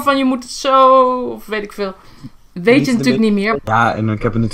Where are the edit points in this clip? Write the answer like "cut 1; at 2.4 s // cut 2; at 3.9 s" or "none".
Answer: cut 1; at 3.6 s